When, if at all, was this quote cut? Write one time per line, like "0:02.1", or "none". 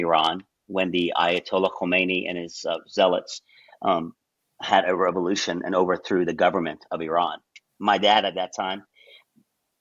none